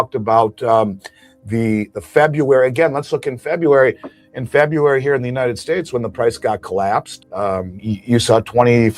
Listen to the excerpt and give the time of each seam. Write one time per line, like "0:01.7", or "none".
0:07.5